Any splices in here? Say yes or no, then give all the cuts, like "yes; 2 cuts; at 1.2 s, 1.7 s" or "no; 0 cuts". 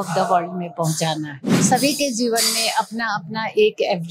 yes; 1 cut; at 1.6 s